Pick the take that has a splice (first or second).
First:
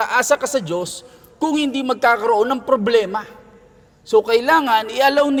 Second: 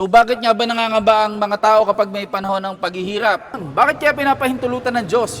second